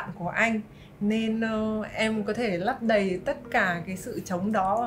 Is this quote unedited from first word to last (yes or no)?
yes